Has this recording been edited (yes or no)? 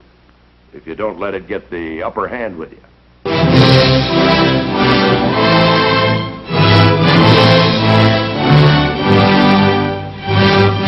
no